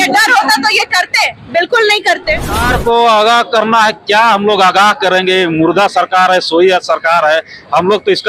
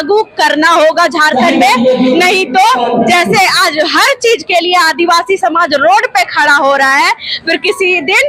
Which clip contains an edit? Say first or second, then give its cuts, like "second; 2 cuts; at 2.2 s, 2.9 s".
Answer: first; 1 cut; at 2.7 s